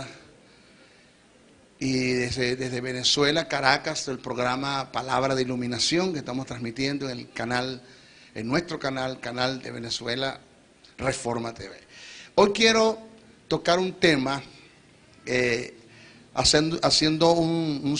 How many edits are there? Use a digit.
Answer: 1